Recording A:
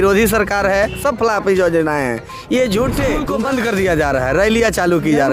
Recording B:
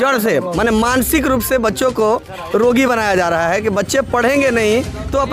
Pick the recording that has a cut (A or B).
A